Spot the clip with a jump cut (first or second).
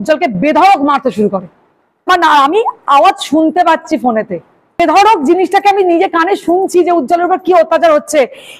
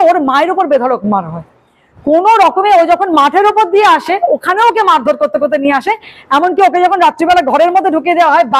first